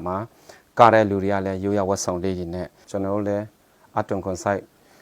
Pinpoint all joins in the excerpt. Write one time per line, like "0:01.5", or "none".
0:02.8